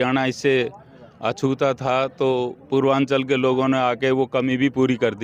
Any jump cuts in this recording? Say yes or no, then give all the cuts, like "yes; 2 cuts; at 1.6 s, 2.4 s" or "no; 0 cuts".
no; 0 cuts